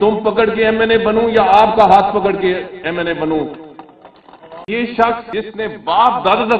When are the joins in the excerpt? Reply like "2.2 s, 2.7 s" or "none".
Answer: 4.7 s, 5.3 s